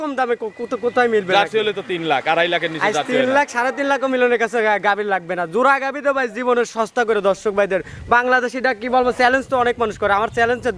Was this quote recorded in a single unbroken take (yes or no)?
yes